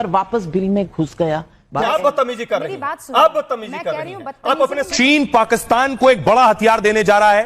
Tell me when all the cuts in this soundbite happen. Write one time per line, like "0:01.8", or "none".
0:01.9
0:04.9